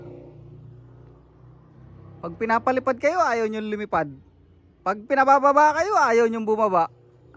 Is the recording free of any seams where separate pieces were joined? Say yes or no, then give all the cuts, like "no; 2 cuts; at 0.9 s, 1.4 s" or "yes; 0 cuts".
yes; 0 cuts